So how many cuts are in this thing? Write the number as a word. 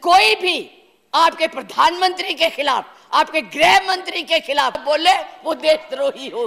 one